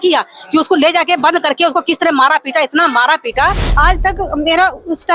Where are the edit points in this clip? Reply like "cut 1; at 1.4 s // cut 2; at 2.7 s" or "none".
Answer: cut 1; at 3.6 s